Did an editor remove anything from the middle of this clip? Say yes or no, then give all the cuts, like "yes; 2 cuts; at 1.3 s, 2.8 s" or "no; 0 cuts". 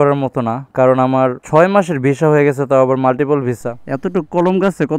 yes; 1 cut; at 3.7 s